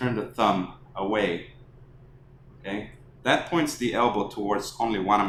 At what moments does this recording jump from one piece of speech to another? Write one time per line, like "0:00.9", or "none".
none